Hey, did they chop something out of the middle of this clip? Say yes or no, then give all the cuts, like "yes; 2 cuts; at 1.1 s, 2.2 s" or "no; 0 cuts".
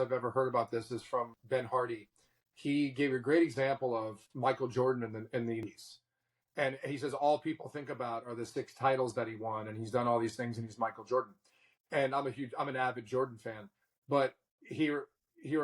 yes; 2 cuts; at 1.4 s, 5.6 s